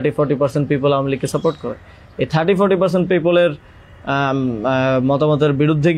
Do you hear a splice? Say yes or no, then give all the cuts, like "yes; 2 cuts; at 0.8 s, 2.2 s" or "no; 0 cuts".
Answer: no; 0 cuts